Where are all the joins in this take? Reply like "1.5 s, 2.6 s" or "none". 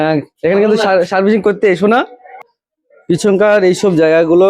2.4 s